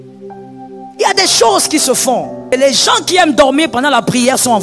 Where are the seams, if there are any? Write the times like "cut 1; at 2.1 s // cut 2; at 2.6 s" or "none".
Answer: cut 1; at 2.4 s